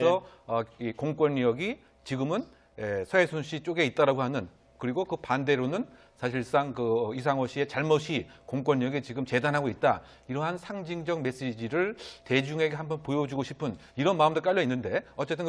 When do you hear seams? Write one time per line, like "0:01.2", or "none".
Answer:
0:09.8